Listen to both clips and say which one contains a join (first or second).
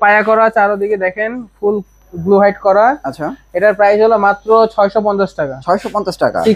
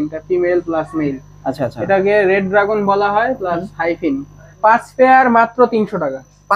second